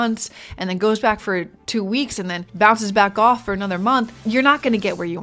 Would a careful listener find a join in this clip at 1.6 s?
yes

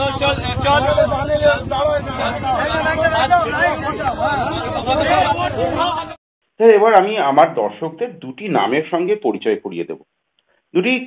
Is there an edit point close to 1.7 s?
no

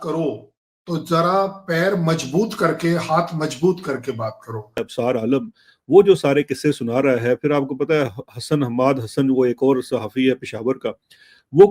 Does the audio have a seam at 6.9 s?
no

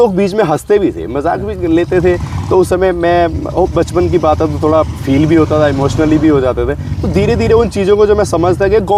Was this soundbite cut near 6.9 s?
no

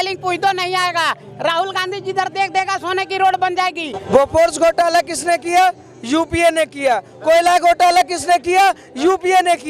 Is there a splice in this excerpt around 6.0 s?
no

